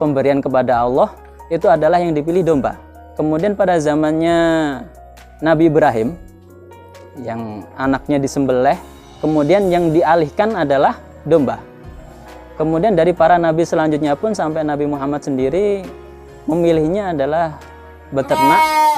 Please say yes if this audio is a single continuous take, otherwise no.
yes